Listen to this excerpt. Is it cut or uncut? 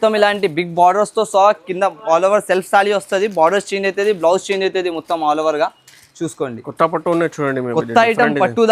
uncut